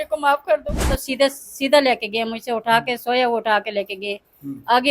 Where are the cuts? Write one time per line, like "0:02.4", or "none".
0:01.0